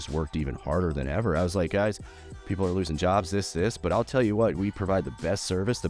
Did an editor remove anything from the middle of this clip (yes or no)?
no